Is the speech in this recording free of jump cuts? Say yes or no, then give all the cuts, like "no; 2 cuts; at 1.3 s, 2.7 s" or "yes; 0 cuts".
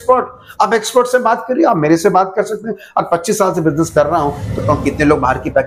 no; 1 cut; at 4.6 s